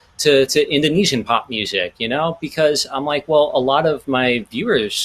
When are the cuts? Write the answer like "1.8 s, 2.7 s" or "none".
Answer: none

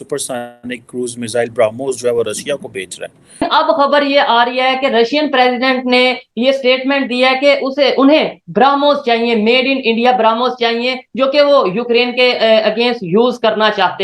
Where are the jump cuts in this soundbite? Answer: 3.4 s

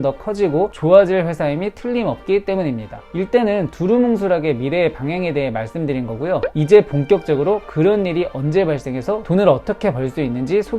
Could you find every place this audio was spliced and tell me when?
none

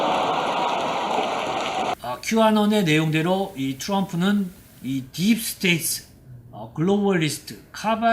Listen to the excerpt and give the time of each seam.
1.8 s

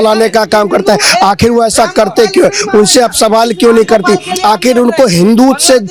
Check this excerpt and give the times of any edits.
none

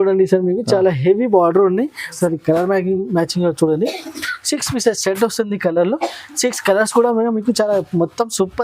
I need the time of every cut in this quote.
2.1 s

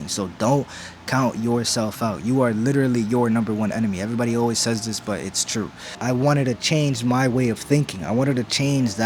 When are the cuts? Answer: 5.9 s

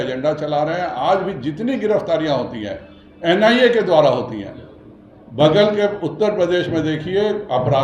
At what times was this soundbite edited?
none

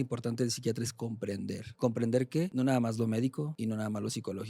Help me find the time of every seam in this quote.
1.7 s, 2.5 s, 3.5 s

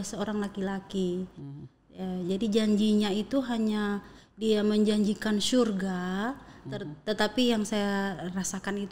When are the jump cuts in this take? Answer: none

